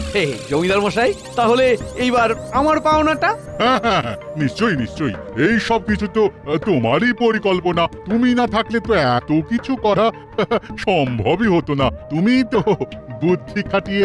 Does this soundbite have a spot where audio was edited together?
no; 0 cuts

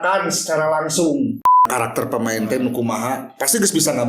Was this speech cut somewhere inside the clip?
yes; 1 cut; at 1.7 s

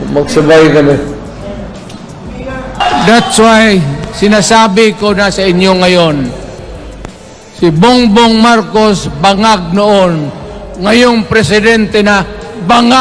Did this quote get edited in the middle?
yes; 1 cut; at 2.8 s

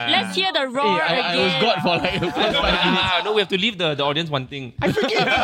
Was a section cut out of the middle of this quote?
yes; 1 cut; at 3.3 s

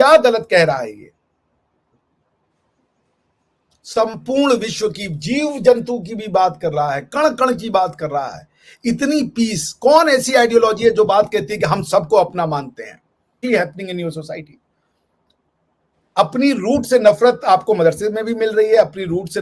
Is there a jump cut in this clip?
yes; 1 cut; at 13.4 s

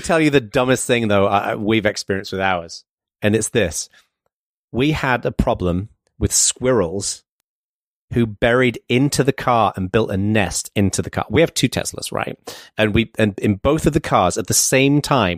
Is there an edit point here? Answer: no; 0 cuts

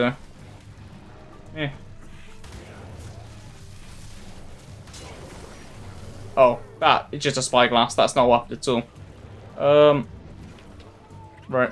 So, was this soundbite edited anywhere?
no; 0 cuts

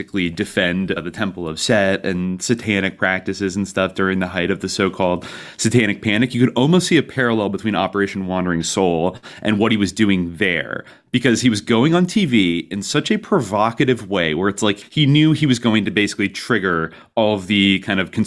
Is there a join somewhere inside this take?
yes; 1 cut; at 14.8 s

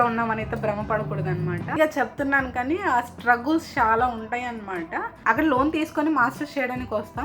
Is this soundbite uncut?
no; 1 cut; at 1.8 s

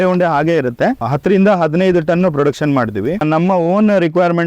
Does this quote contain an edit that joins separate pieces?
yes; 2 cuts; at 1.1 s, 3.2 s

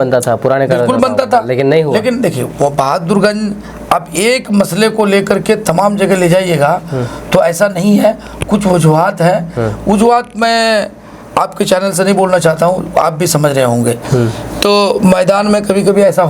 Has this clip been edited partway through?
no; 0 cuts

